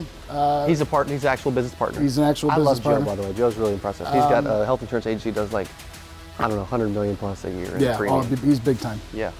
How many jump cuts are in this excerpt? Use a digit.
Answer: 0